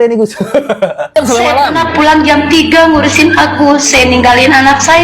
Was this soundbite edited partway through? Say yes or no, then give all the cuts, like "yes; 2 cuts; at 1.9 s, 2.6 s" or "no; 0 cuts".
yes; 1 cut; at 1.1 s